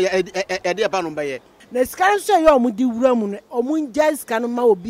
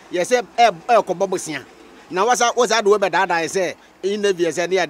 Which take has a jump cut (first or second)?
first